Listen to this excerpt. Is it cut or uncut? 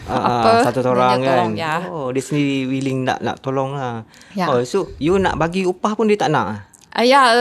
uncut